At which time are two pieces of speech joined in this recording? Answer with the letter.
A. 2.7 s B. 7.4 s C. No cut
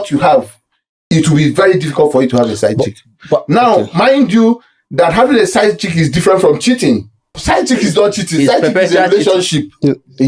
B